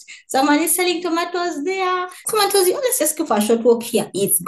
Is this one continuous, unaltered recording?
no; 1 cut; at 2.2 s

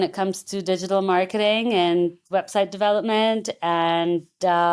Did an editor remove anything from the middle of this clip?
no; 0 cuts

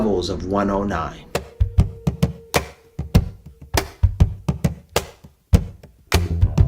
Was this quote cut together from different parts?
yes; 1 cut; at 1.2 s

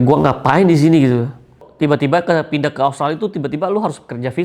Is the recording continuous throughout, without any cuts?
no; 1 cut; at 1.7 s

